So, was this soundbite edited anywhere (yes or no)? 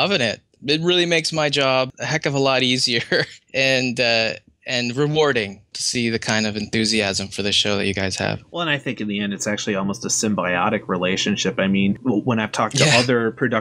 no